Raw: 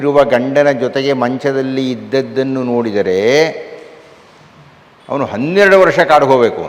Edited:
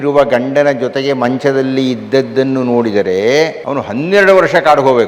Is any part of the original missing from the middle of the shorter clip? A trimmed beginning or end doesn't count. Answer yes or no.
yes